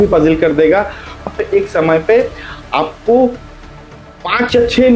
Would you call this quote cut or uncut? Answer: cut